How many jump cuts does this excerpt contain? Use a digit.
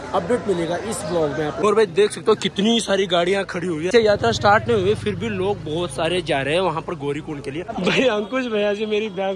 3